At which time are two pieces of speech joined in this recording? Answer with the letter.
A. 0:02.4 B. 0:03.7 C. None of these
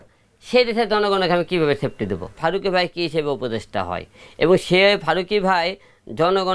A